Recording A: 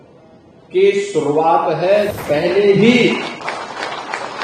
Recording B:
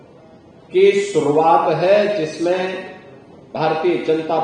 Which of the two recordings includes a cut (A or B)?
A